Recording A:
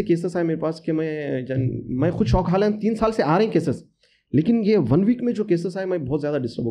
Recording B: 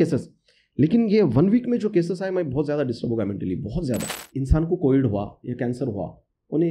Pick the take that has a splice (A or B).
B